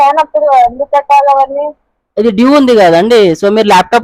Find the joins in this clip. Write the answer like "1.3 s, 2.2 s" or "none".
none